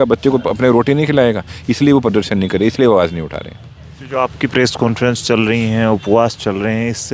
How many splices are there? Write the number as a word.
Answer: zero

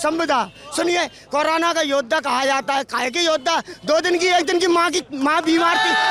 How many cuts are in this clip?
zero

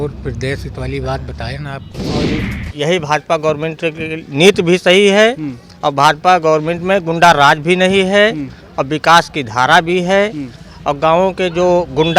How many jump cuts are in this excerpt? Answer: one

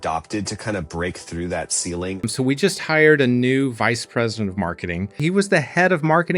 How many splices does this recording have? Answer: two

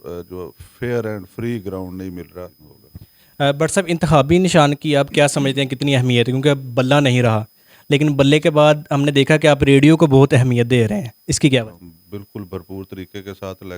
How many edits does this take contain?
two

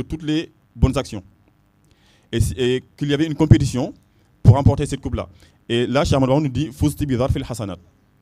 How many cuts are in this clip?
zero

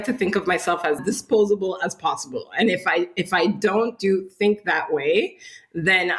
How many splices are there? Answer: one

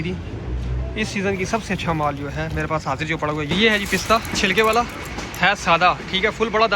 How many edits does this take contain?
one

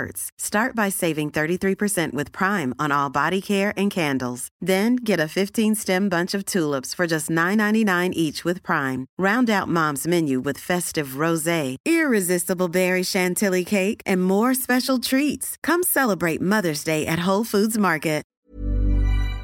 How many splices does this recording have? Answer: one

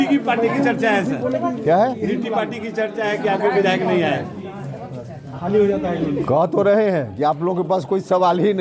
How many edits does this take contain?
zero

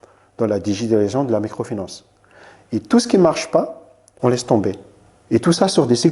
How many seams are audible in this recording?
one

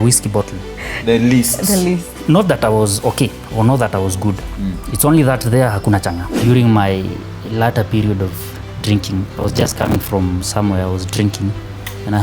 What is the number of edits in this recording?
three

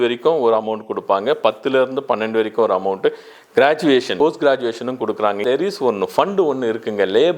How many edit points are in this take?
two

